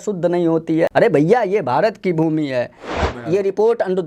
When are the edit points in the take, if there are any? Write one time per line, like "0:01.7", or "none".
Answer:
0:00.9
0:03.0